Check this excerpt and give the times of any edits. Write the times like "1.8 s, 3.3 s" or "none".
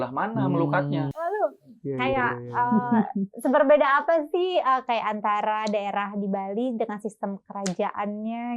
1.1 s